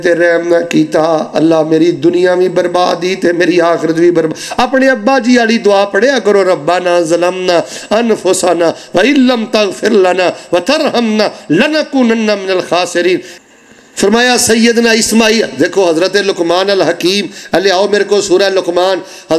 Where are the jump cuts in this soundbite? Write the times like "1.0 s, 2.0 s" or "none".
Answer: 13.3 s